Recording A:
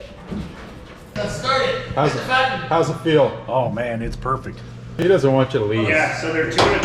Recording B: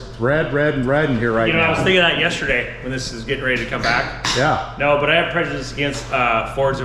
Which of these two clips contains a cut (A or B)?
A